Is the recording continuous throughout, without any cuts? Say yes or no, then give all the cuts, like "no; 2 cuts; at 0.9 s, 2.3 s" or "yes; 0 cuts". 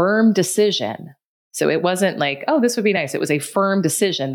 yes; 0 cuts